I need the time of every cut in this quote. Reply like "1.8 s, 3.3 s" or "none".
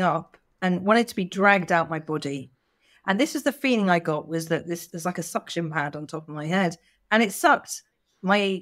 none